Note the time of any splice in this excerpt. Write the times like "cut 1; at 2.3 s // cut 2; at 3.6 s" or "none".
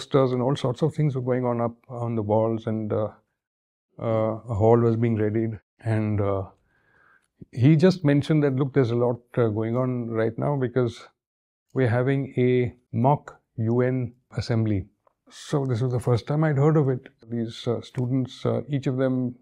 cut 1; at 5.7 s // cut 2; at 12.8 s // cut 3; at 14.4 s // cut 4; at 15.3 s // cut 5; at 17.3 s